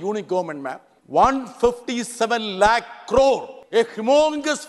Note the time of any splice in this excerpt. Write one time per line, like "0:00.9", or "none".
0:00.9
0:03.5